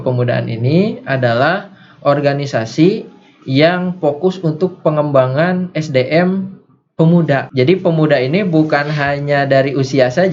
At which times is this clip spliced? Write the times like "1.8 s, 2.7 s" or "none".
7.5 s